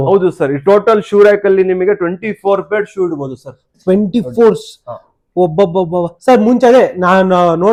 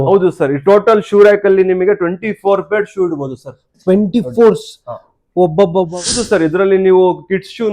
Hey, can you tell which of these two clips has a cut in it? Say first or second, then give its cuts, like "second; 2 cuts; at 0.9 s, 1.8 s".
second; 1 cut; at 6.1 s